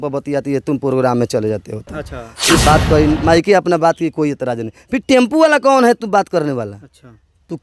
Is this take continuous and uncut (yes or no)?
no